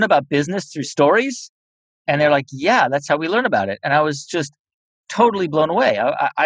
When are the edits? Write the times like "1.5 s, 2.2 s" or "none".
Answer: none